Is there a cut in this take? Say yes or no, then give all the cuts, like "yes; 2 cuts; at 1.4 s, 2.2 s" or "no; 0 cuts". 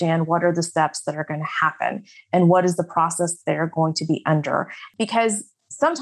yes; 1 cut; at 4.8 s